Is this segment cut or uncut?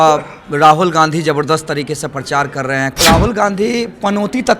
cut